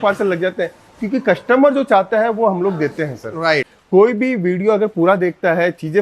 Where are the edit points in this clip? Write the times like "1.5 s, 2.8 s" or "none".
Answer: 3.4 s